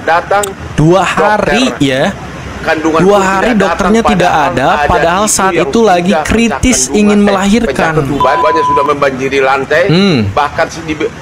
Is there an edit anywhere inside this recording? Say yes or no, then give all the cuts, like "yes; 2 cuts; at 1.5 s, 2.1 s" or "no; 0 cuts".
yes; 1 cut; at 8.4 s